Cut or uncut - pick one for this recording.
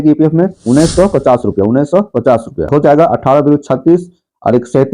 cut